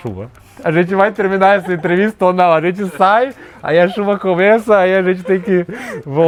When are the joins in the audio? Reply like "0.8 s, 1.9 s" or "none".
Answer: none